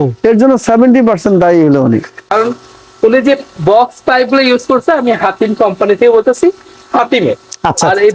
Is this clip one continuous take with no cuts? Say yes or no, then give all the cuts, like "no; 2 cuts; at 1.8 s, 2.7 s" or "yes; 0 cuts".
no; 1 cut; at 2.2 s